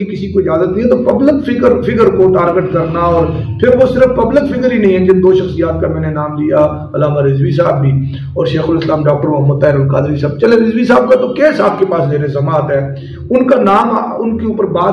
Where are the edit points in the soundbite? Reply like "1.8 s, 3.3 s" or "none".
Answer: none